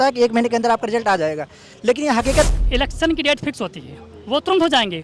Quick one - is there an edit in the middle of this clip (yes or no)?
yes